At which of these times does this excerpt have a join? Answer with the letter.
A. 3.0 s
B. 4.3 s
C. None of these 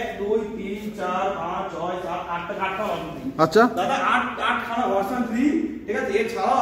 C